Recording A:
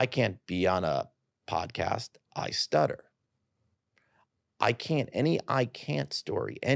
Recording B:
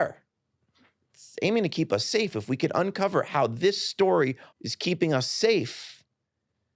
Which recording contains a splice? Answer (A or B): B